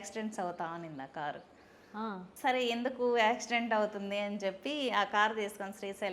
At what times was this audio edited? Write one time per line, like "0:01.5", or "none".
0:02.3